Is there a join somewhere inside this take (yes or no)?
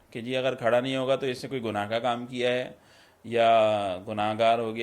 no